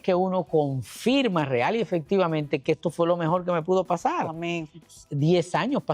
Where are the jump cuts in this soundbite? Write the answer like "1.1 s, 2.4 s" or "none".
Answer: 4.7 s